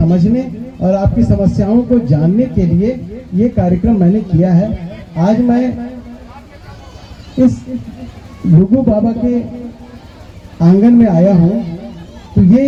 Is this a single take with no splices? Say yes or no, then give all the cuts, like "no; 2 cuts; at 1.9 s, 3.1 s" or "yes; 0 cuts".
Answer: yes; 0 cuts